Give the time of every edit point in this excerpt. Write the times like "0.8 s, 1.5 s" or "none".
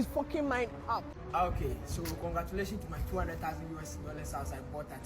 1.2 s